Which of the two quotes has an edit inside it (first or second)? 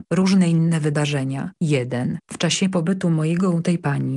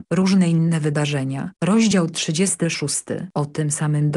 second